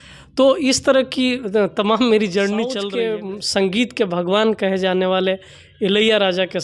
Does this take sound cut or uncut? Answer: cut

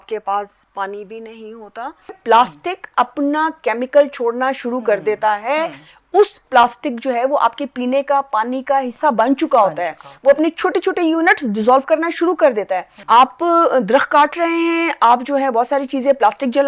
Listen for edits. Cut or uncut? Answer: cut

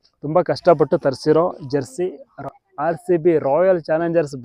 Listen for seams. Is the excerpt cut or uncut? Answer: cut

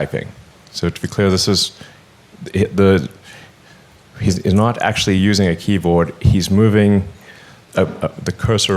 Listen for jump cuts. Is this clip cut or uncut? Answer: uncut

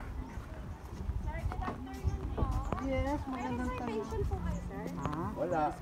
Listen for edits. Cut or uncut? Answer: uncut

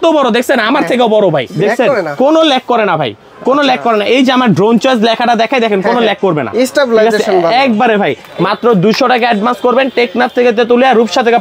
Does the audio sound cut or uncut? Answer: cut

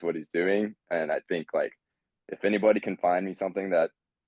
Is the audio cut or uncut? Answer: uncut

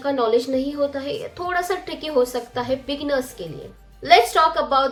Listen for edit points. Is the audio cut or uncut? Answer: uncut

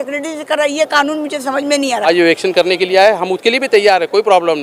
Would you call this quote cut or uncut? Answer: cut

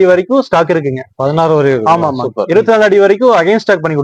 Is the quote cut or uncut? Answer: uncut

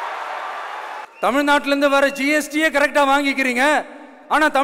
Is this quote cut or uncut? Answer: cut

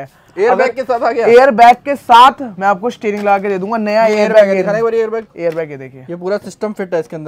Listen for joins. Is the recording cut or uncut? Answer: uncut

